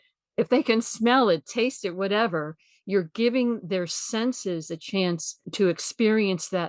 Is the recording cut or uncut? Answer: cut